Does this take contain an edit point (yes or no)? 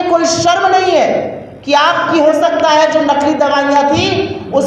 no